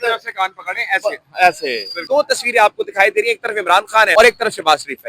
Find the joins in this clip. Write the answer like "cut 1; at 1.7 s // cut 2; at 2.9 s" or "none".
cut 1; at 2.0 s // cut 2; at 4.1 s